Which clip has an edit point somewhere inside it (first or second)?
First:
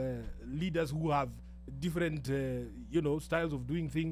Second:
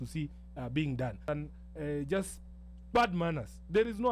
second